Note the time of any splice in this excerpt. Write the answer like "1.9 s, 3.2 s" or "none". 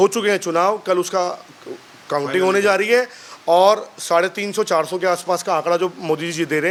none

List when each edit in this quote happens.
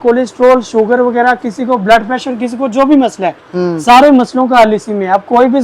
none

